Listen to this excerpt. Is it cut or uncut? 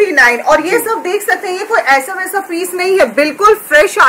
uncut